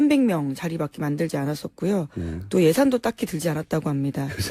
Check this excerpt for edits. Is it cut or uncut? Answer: uncut